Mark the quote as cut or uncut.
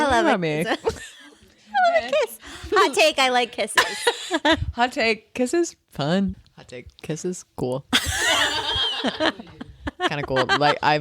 cut